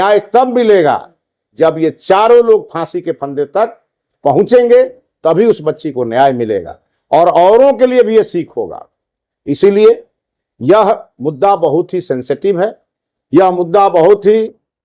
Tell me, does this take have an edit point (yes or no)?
no